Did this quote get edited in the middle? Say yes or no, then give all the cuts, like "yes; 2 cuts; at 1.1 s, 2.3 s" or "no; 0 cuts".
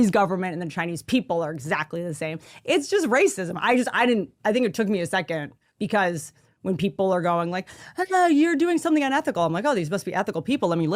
no; 0 cuts